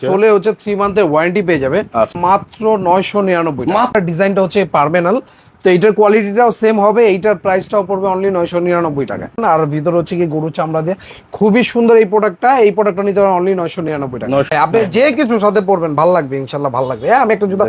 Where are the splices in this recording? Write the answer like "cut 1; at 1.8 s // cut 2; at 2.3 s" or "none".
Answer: cut 1; at 2.1 s // cut 2; at 3.9 s // cut 3; at 9.4 s // cut 4; at 14.5 s